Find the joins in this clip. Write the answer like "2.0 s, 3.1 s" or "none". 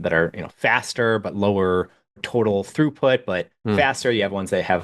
2.2 s